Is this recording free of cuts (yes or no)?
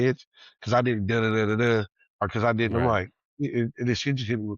yes